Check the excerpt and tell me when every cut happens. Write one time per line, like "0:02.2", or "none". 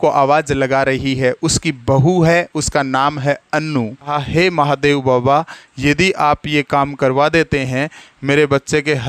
0:04.1